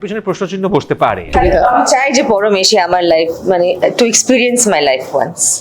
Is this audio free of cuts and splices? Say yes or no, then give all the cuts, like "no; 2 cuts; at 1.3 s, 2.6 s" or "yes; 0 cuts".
no; 1 cut; at 1.3 s